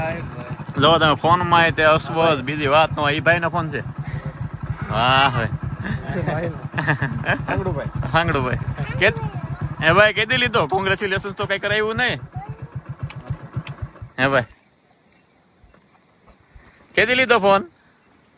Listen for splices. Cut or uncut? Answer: uncut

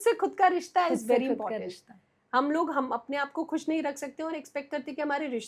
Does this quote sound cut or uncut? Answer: uncut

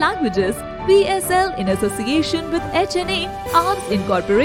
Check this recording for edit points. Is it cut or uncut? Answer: uncut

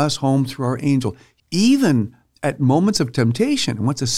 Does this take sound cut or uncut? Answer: cut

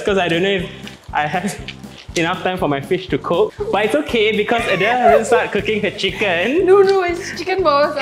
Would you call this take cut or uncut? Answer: cut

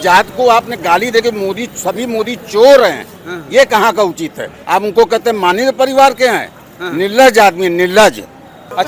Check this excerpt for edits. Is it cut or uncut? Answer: uncut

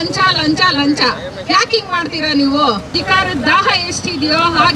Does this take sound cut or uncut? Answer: cut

